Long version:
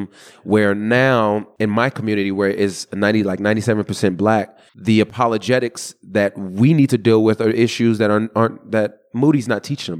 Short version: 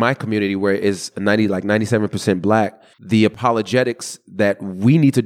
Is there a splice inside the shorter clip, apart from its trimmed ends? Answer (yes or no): no